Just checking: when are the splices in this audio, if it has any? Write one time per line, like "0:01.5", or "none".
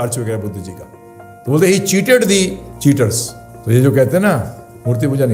none